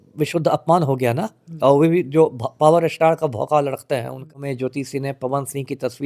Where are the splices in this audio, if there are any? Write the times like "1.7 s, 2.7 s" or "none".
4.3 s